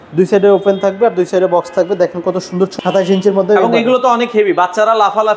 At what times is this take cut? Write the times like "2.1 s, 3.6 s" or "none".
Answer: 2.7 s